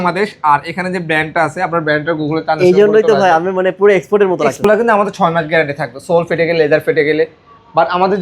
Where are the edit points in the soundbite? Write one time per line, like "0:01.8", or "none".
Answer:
0:04.6